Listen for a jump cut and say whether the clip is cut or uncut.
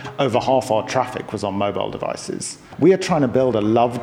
cut